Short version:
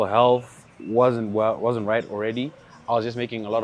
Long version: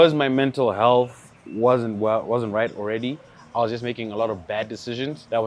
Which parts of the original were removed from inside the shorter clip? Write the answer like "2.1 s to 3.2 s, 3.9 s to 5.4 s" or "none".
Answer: none